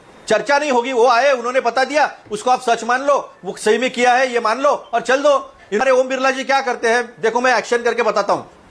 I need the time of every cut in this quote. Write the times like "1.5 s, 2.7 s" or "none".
5.8 s